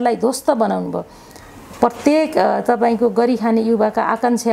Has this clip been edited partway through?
no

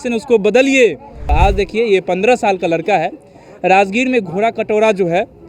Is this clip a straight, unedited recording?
no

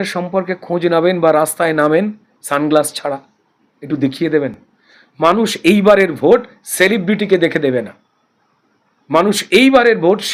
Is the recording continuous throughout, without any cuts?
yes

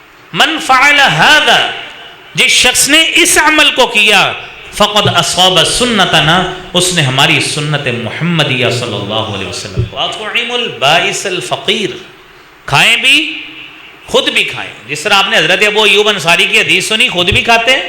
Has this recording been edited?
yes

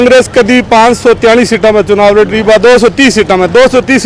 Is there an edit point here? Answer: no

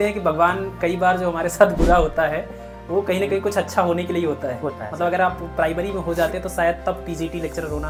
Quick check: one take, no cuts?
yes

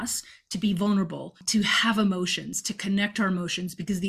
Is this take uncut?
yes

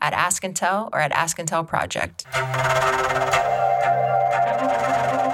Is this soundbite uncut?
no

